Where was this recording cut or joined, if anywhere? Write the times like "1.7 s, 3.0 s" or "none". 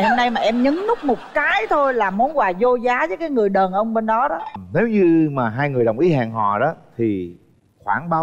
4.6 s